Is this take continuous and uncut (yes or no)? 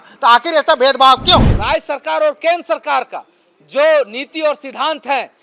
no